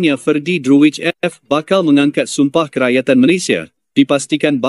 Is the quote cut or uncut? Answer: uncut